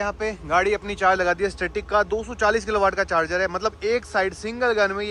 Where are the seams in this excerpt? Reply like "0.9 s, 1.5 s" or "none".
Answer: none